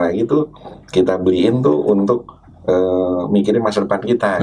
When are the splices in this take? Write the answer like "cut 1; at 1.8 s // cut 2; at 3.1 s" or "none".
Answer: none